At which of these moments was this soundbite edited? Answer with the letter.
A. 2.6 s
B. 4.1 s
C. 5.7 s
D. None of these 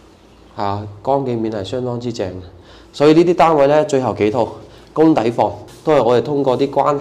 C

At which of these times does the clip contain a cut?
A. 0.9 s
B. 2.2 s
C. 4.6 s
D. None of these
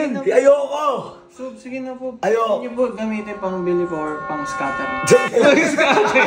D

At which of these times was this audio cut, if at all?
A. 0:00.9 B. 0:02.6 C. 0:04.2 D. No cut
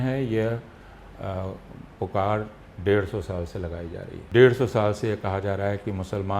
C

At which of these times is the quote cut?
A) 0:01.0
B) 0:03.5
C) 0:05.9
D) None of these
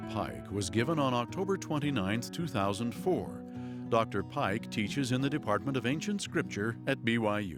D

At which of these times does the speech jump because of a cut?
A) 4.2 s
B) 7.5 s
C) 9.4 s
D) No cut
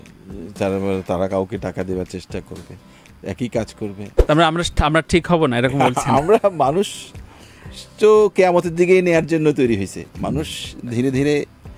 A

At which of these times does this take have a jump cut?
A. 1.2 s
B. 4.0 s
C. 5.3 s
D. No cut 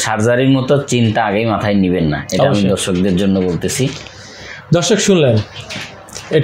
D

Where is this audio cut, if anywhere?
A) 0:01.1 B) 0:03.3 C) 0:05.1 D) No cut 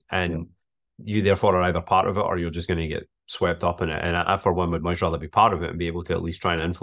D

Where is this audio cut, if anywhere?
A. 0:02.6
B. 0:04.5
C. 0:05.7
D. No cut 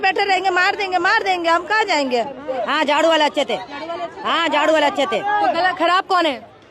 A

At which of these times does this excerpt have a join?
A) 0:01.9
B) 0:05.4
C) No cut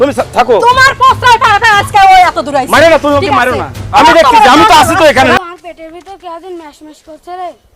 B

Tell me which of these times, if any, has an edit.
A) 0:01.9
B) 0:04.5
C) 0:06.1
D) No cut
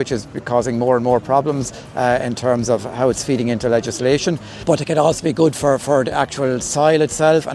B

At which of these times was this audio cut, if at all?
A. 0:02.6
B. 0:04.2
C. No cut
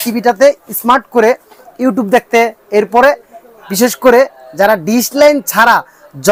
C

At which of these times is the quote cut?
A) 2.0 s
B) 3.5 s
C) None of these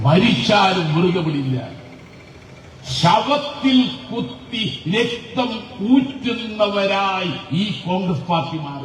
C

